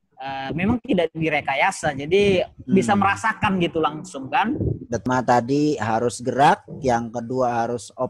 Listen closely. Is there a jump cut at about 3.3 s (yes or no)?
no